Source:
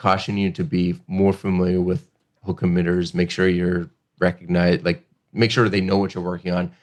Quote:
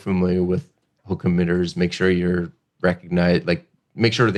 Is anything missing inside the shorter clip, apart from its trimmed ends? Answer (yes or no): no